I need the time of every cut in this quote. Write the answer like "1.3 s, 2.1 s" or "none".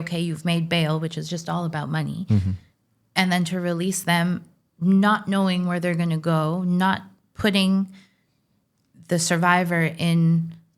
none